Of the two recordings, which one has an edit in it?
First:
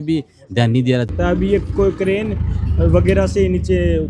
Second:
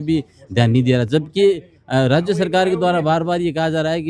first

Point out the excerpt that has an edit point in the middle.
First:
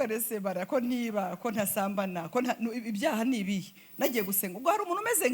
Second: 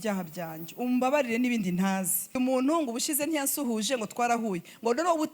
second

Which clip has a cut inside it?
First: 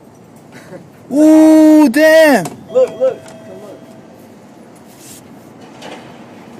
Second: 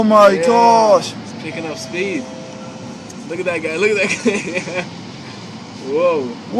first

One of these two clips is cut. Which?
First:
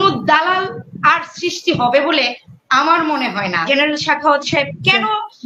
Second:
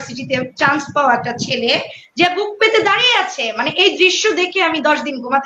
first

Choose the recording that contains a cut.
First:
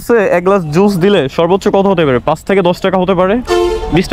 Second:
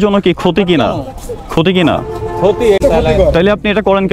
second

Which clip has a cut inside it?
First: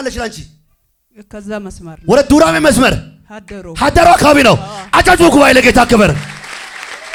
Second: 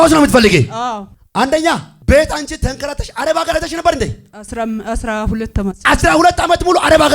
second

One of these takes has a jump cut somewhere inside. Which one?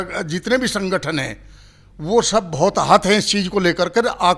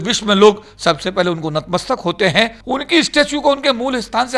second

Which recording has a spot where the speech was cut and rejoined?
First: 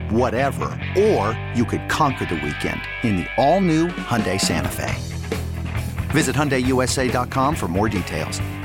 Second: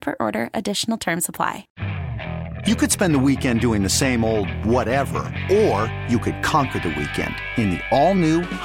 second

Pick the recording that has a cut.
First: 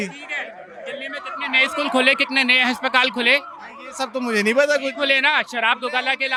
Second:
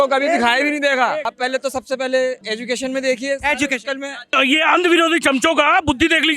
second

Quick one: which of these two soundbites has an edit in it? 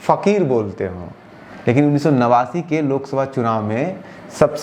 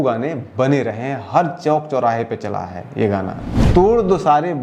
second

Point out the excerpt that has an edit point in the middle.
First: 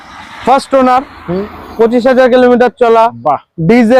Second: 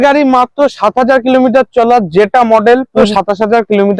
second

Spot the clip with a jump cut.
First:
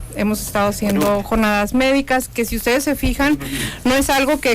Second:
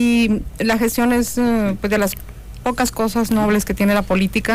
first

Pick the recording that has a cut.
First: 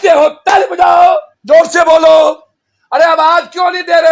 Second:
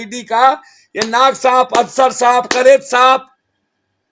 first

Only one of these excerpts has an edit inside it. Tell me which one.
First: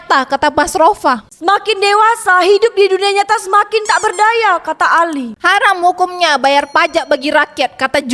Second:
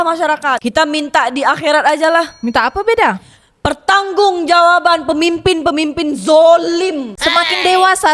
second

